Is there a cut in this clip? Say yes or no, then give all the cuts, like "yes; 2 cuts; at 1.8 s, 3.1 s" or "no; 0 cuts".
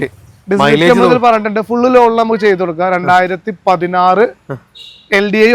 no; 0 cuts